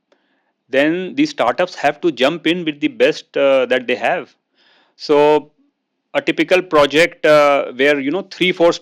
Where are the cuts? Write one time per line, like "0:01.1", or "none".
none